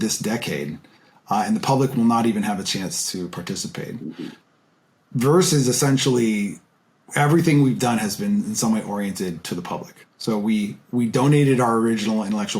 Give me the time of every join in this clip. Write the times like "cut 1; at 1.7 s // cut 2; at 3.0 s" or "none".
none